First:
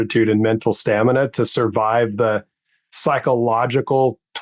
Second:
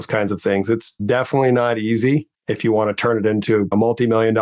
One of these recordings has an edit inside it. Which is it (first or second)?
second